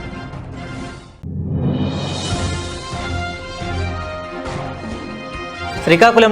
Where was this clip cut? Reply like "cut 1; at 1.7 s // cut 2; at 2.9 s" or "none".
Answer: cut 1; at 4.1 s